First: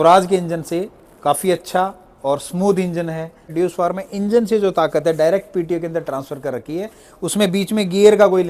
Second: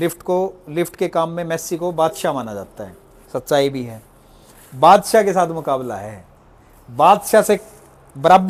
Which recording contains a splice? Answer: first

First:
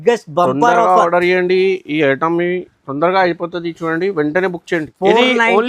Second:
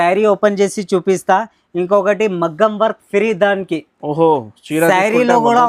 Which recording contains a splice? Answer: first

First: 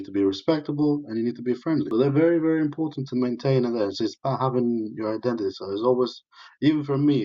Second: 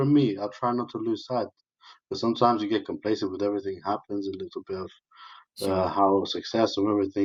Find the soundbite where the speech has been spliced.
first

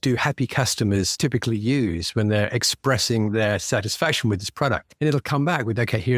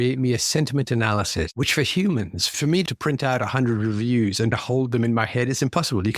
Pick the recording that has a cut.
second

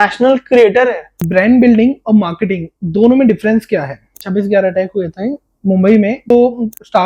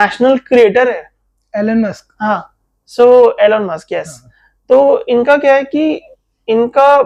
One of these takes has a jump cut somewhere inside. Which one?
first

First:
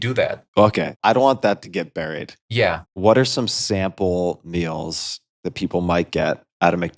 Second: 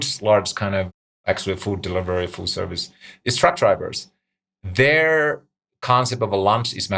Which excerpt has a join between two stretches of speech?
second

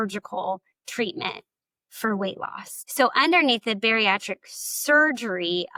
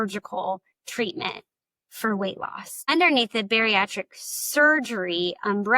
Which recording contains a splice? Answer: second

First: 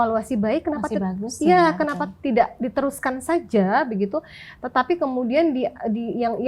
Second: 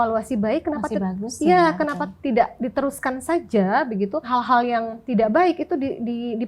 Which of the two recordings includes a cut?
second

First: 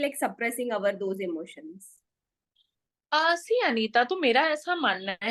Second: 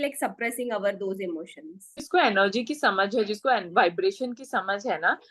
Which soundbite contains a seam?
second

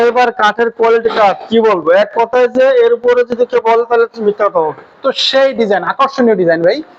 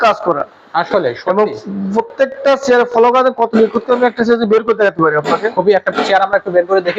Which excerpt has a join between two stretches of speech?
first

